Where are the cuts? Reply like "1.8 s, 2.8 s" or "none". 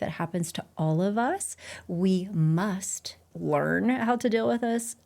3.3 s